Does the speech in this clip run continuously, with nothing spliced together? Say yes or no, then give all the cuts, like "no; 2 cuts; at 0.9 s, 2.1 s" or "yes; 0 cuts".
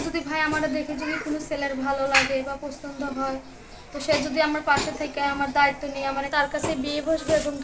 no; 1 cut; at 6.3 s